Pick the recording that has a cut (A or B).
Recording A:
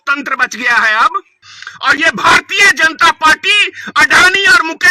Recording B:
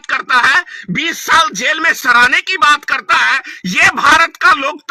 A